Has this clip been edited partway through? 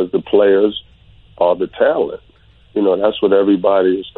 no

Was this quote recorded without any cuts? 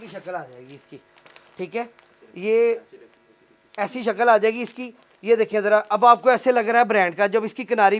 yes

